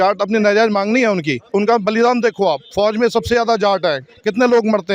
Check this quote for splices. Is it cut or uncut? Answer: cut